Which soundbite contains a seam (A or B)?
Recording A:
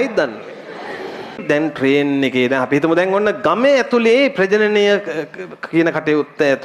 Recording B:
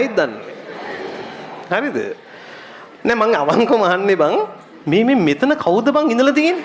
A